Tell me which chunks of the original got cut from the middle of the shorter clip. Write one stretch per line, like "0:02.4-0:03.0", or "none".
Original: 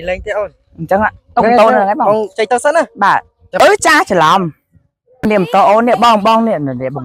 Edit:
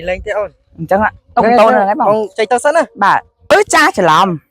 0:03.6-0:03.7